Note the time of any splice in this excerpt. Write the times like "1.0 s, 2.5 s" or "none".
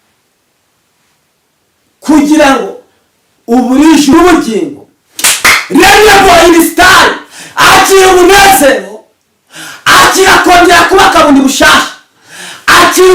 4.1 s